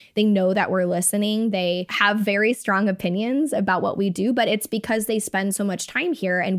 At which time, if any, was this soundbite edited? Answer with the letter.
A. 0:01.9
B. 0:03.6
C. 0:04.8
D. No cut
A